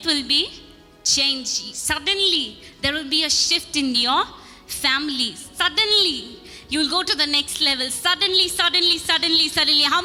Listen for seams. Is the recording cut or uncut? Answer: uncut